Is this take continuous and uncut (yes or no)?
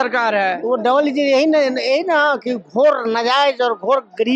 yes